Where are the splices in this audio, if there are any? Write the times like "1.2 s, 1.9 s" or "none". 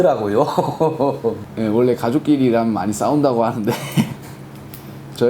1.5 s